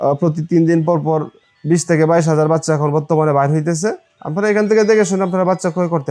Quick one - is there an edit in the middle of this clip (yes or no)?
no